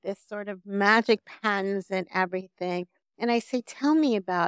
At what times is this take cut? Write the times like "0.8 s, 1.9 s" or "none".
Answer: none